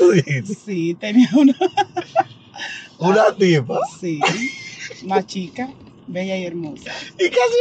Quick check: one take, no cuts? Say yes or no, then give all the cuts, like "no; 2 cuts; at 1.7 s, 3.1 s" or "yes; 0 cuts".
yes; 0 cuts